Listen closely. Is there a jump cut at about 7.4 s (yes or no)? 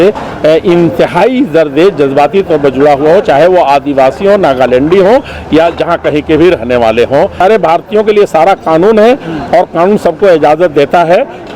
yes